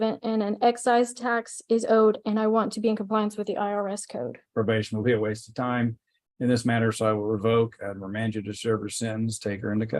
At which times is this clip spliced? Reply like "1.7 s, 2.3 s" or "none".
4.4 s